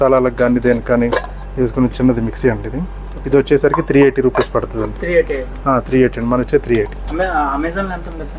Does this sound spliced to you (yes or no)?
no